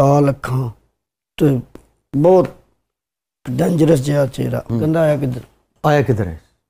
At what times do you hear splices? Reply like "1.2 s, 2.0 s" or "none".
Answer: 4.8 s